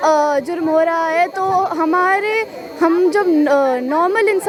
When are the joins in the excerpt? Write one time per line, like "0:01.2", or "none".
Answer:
none